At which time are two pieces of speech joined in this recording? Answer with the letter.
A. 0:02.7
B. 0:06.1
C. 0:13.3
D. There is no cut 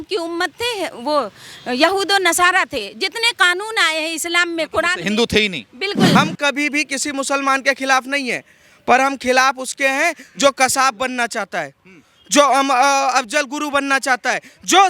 B